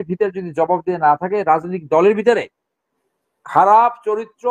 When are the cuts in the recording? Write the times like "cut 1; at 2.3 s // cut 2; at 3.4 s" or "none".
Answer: none